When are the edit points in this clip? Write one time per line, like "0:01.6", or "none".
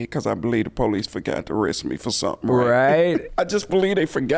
0:03.3